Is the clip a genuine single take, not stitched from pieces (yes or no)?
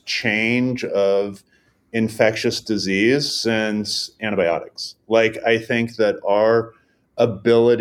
yes